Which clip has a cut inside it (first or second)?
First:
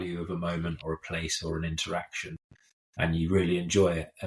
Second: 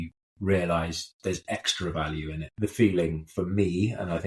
second